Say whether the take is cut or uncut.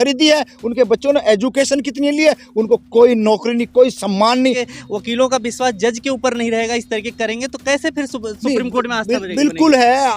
cut